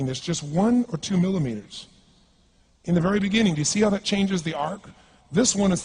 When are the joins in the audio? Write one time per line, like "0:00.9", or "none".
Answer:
0:03.2

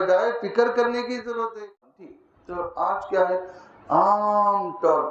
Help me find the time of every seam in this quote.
0:02.1

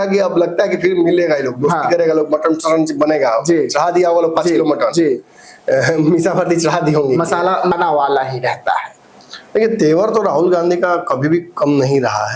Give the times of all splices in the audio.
0:07.7

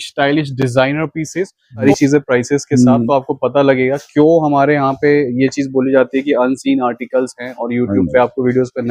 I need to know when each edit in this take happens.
0:01.8

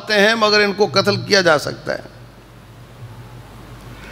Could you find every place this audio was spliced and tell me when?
none

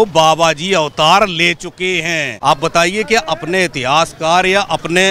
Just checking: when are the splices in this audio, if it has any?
0:02.3

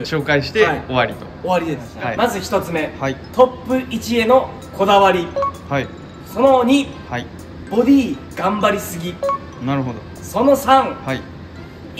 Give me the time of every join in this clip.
0:01.9

